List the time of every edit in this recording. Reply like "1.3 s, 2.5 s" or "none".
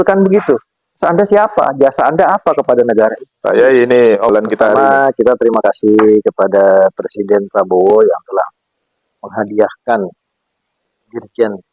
4.3 s